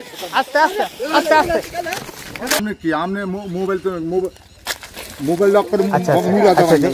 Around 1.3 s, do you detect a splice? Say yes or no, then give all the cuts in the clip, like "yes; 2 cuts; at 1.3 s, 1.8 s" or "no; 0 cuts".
no; 1 cut; at 2.6 s